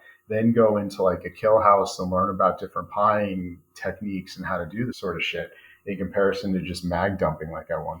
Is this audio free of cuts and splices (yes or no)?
no